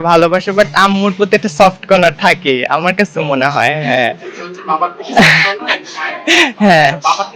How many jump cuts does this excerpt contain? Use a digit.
0